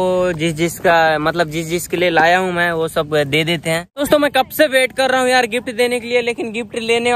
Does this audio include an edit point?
yes; 1 cut; at 3.9 s

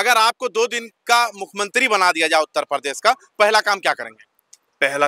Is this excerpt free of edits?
yes; 0 cuts

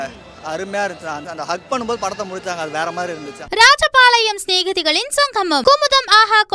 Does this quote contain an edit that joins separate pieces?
yes; 2 cuts; at 1.3 s, 3.3 s

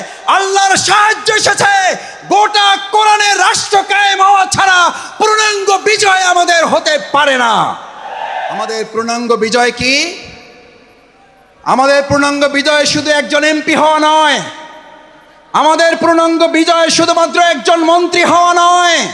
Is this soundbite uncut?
no; 1 cut; at 8.7 s

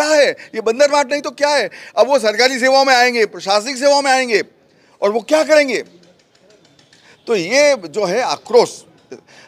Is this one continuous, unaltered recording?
yes; 0 cuts

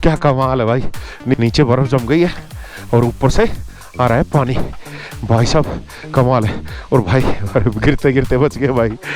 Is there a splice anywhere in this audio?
yes; 1 cut; at 1.3 s

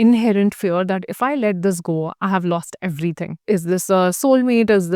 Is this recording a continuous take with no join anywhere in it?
no; 1 cut; at 3.3 s

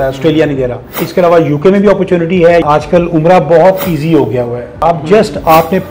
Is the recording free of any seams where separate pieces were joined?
no; 3 cuts; at 1.0 s, 2.6 s, 4.8 s

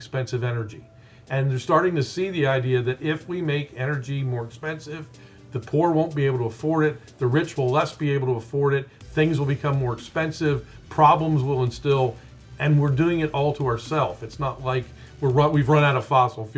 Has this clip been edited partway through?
no; 0 cuts

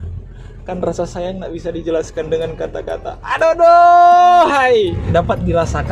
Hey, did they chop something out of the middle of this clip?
yes; 1 cut; at 5.0 s

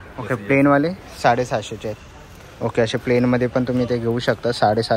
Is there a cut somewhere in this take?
no; 0 cuts

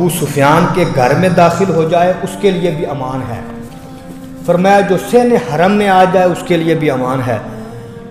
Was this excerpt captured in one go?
yes; 0 cuts

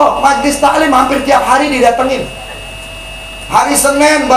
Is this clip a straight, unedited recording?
yes; 0 cuts

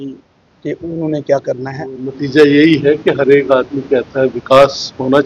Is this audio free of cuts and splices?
no; 1 cut; at 2.2 s

